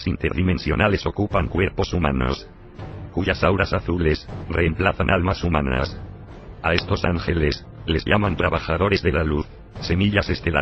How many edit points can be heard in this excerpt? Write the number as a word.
one